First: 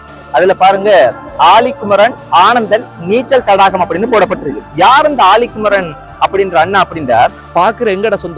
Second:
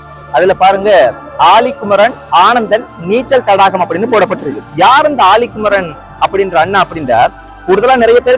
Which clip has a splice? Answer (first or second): first